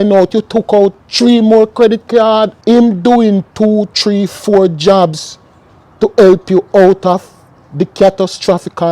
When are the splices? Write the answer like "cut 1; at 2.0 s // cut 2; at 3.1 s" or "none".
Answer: cut 1; at 2.5 s